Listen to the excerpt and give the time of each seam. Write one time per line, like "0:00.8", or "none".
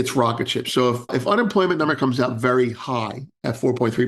0:01.1